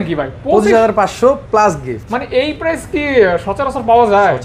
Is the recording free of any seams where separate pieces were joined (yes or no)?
yes